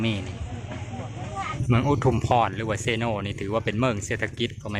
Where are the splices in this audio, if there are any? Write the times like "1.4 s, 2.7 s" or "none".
1.5 s